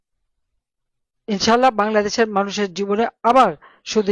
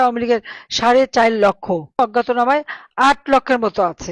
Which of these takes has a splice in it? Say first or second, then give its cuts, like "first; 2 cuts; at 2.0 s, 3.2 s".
second; 1 cut; at 2.0 s